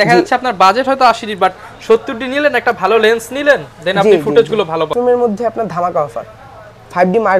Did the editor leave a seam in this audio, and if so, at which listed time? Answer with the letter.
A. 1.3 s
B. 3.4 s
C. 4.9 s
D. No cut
C